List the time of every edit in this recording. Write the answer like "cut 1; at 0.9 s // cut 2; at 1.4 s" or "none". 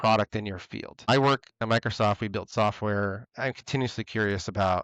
cut 1; at 1.1 s // cut 2; at 3.2 s